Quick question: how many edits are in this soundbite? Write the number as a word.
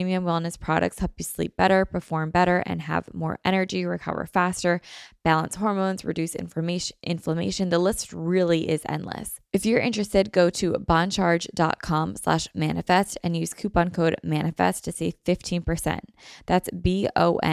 one